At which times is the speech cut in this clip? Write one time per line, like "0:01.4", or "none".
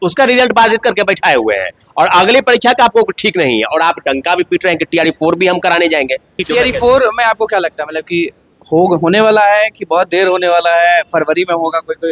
0:06.4